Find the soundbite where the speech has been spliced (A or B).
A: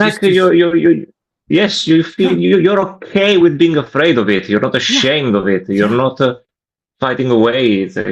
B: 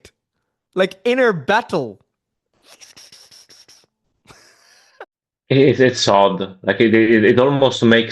B